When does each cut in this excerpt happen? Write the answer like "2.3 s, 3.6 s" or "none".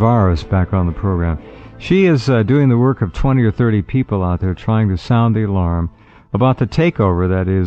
2.2 s